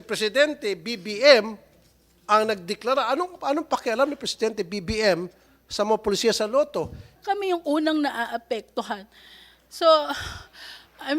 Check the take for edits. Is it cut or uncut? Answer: cut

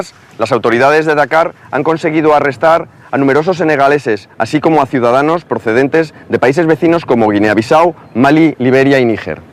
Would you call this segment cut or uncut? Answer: cut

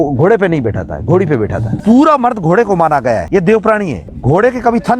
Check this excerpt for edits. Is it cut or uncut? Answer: cut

